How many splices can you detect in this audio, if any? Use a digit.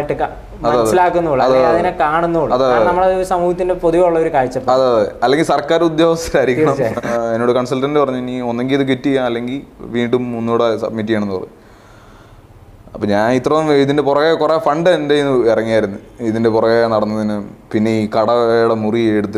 1